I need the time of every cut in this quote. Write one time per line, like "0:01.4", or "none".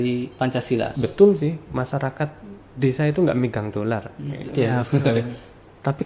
0:00.9

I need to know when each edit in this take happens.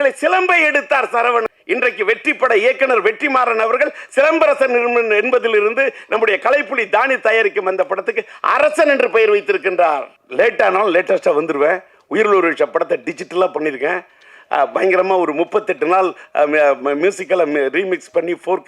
0:01.4
0:10.2

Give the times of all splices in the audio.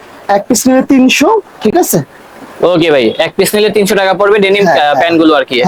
none

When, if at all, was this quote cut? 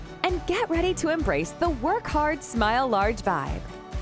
none

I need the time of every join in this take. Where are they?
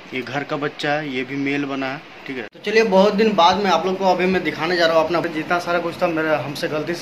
0:02.5
0:05.3

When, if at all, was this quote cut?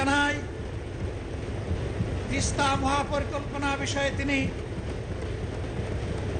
none

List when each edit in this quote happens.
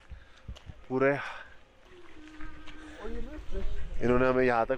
0:01.9

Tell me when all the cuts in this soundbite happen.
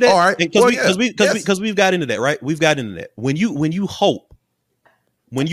none

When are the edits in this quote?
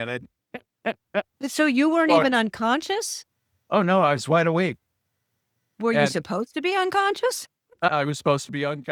none

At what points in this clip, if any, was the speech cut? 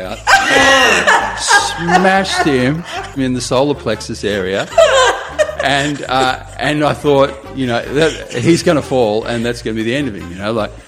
0:03.2
0:05.5

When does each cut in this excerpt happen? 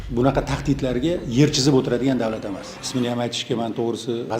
0:02.7

